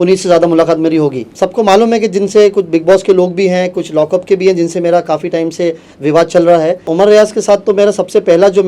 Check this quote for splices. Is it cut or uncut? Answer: cut